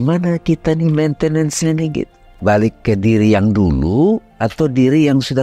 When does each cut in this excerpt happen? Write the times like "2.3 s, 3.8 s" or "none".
2.2 s

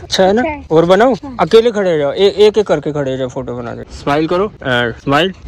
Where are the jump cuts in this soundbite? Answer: none

